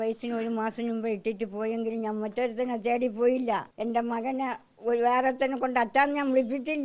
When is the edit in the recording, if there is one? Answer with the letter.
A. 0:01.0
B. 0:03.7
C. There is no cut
B